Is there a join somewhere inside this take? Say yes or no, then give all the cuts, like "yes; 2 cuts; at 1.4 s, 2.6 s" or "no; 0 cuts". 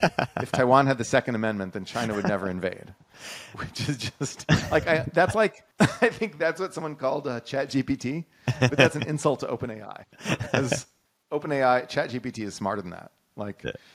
yes; 1 cut; at 5.6 s